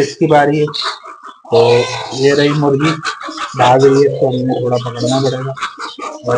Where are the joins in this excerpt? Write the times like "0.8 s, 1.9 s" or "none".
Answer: none